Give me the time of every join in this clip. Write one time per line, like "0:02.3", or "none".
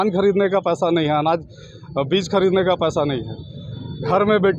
none